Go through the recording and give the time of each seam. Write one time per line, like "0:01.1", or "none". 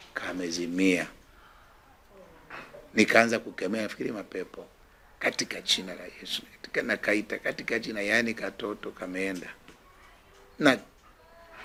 none